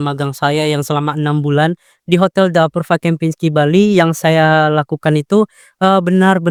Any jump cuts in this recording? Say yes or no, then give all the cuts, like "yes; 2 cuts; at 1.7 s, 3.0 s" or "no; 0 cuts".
no; 0 cuts